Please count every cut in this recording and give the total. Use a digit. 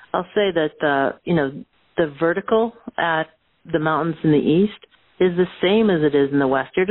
0